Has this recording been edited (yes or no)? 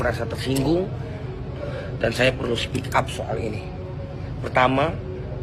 no